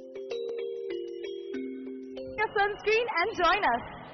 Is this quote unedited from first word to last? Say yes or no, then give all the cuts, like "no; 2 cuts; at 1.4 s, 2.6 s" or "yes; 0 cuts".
yes; 0 cuts